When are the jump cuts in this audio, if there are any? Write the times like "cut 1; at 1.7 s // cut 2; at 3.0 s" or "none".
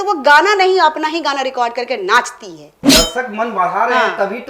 cut 1; at 2.8 s